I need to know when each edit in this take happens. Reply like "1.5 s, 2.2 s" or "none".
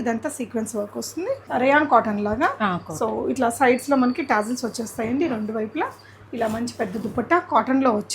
1.4 s

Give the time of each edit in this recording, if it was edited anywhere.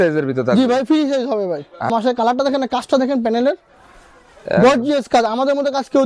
1.9 s

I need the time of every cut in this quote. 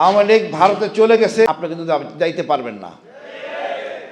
1.5 s

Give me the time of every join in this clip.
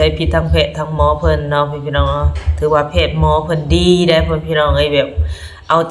none

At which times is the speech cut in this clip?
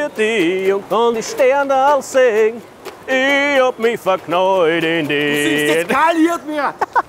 none

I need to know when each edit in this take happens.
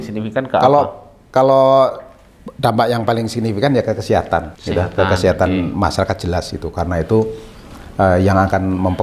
4.6 s

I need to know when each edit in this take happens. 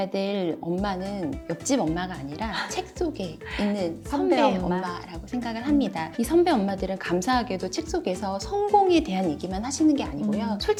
none

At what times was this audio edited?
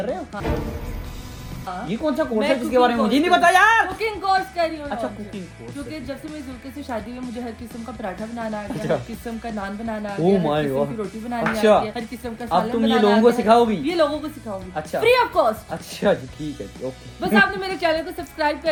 none

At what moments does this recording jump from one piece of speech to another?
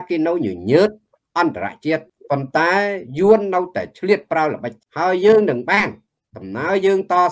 2.1 s, 4.8 s

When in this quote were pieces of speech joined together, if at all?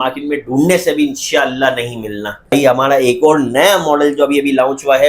2.5 s

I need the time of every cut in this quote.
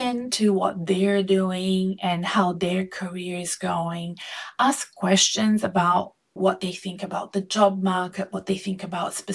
6.3 s

